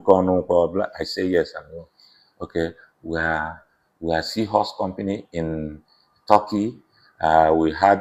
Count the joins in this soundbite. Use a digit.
0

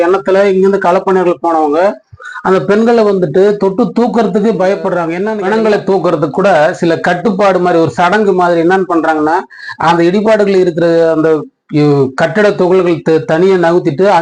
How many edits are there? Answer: 1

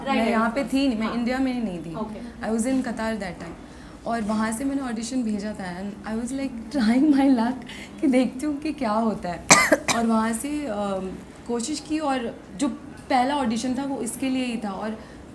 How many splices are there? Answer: 0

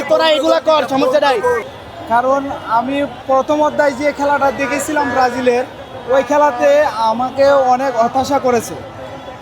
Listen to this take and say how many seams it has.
1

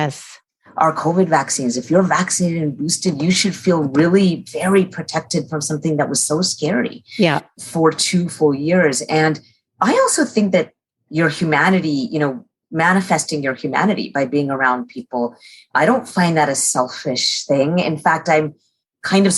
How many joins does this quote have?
1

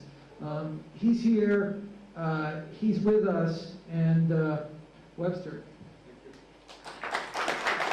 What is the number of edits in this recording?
1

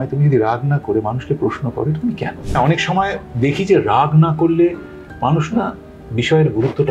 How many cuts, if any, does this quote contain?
1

